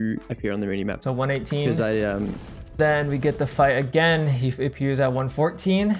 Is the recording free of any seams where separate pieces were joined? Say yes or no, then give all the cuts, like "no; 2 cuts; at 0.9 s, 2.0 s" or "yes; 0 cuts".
no; 2 cuts; at 1.0 s, 2.8 s